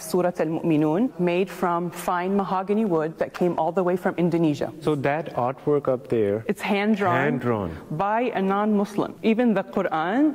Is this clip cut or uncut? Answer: cut